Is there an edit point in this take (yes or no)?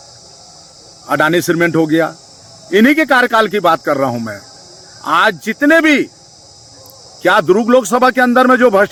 no